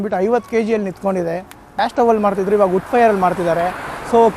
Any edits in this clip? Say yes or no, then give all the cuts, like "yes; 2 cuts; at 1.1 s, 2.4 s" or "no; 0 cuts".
yes; 1 cut; at 1.7 s